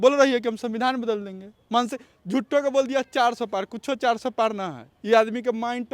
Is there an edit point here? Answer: no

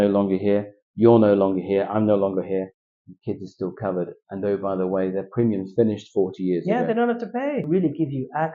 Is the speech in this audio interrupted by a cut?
yes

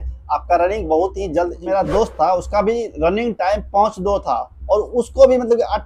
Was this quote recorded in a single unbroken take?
no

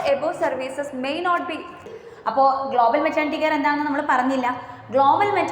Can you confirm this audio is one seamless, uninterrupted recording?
no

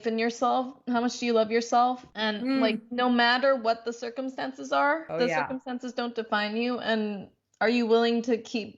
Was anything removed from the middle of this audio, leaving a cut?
yes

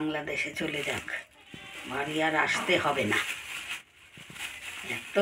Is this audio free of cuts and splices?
yes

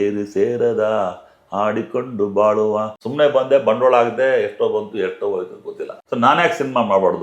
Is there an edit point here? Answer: yes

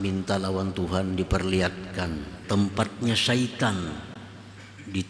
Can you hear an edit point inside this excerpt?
yes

